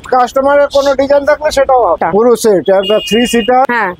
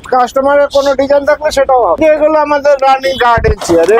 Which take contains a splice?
first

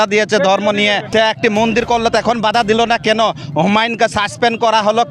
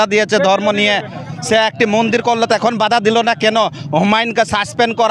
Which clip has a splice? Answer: first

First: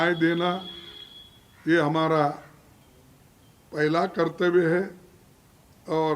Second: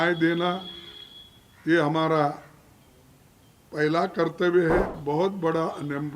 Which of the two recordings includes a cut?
second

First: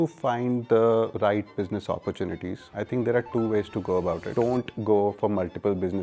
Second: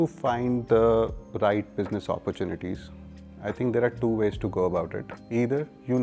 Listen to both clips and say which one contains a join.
first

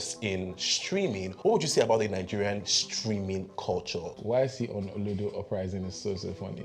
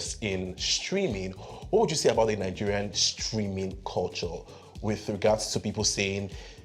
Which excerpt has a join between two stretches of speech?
first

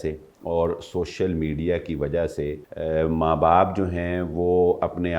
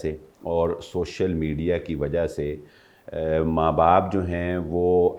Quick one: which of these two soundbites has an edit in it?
first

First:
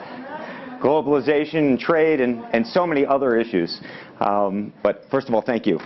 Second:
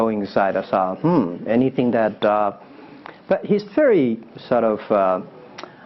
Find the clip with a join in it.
first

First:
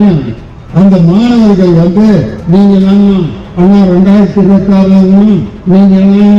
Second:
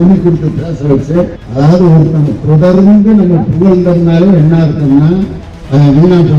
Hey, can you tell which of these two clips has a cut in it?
second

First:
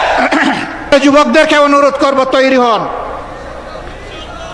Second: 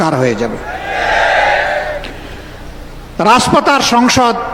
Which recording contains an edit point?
first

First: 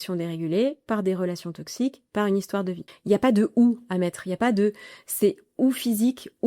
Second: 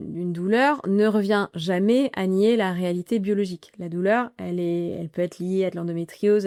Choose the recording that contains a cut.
first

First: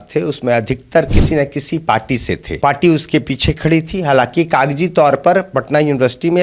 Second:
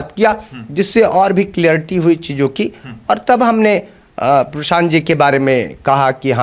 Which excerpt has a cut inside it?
first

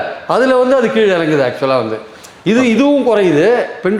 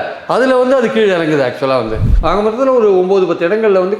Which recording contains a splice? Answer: second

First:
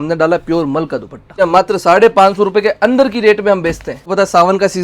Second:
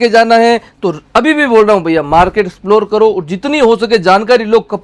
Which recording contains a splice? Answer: first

